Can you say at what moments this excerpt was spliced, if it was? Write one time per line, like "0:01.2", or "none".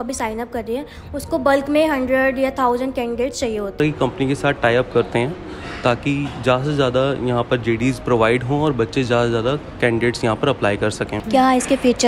0:03.8
0:11.1